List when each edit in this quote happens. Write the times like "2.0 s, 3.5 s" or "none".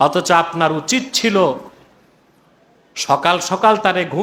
none